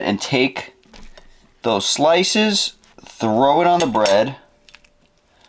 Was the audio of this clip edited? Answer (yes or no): no